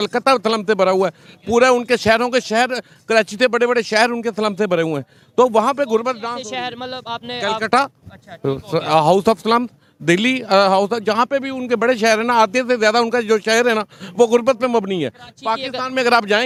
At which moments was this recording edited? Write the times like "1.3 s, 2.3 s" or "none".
none